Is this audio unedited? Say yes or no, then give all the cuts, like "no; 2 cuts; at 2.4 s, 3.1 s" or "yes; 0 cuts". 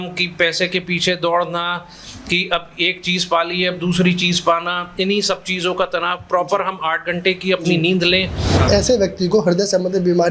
no; 1 cut; at 8.5 s